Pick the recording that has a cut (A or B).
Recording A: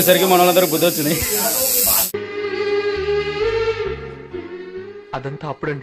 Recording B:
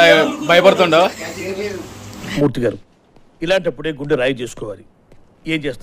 A